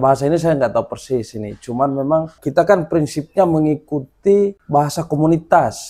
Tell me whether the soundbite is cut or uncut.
cut